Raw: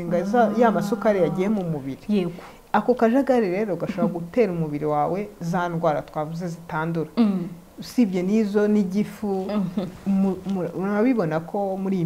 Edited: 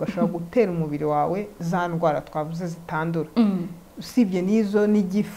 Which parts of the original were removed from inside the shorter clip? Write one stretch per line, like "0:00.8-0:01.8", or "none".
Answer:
none